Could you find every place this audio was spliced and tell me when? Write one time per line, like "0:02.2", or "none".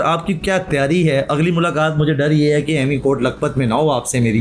none